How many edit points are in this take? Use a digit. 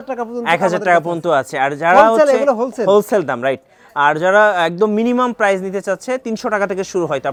0